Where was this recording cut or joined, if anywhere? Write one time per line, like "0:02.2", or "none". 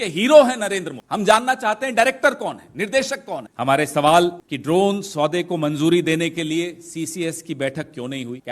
0:03.5